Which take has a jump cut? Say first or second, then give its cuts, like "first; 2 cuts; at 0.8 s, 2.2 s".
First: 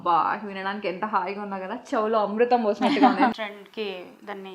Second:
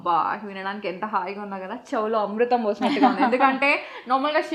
first; 1 cut; at 3.3 s